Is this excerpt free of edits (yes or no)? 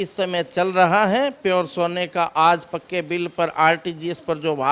yes